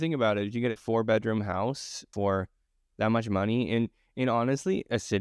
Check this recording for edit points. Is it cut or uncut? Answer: cut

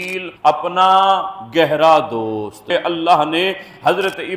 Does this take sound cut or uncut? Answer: cut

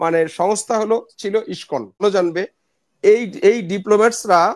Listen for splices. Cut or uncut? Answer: cut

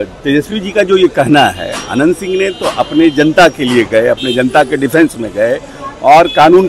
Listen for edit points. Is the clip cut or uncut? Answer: uncut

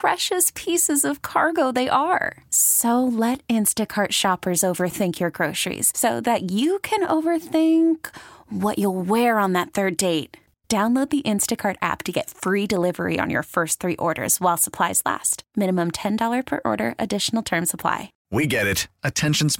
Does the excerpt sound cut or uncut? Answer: cut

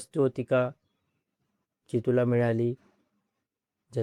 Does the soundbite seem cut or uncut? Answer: uncut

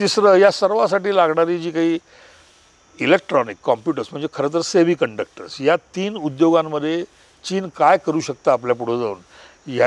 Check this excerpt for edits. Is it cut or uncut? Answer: uncut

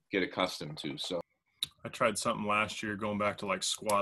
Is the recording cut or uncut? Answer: cut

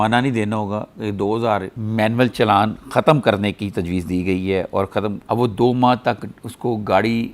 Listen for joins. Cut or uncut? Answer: cut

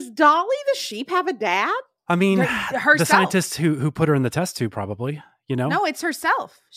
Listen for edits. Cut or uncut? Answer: cut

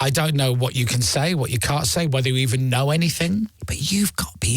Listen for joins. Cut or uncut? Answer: cut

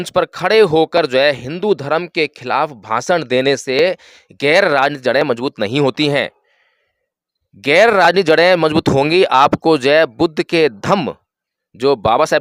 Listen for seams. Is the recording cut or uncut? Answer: uncut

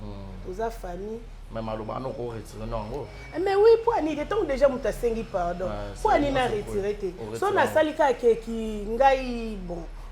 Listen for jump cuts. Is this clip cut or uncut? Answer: uncut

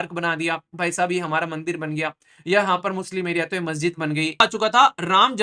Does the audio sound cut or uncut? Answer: cut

